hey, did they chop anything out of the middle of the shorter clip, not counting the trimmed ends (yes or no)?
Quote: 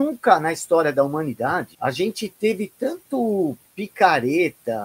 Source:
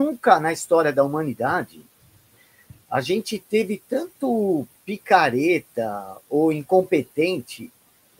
yes